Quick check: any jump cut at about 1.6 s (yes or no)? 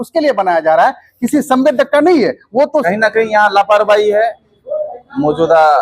no